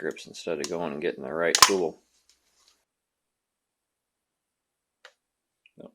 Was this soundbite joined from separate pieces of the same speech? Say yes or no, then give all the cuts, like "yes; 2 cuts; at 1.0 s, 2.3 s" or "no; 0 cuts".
yes; 1 cut; at 2.8 s